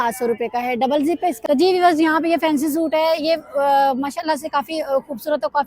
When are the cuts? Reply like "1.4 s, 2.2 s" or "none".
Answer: 1.4 s